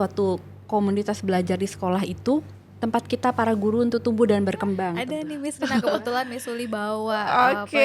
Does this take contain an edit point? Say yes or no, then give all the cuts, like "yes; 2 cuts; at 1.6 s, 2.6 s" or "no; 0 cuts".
yes; 1 cut; at 5.0 s